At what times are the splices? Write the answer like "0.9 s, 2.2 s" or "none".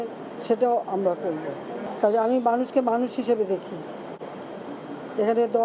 none